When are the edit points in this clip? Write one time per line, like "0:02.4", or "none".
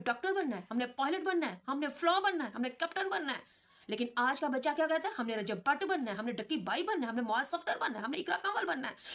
none